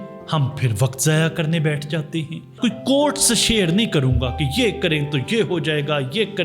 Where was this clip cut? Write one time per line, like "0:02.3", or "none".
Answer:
0:02.6